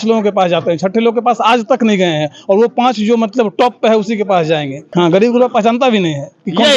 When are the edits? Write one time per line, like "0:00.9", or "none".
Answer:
0:04.8